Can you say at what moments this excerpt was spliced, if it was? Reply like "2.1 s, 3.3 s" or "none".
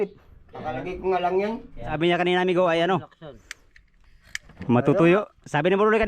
2.0 s